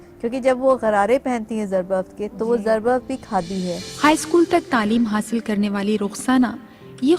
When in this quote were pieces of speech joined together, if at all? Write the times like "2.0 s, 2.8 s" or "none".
3.9 s